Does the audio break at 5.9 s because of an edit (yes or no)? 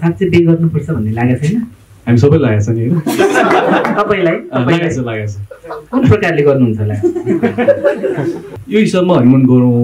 no